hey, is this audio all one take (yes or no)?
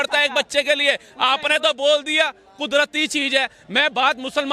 yes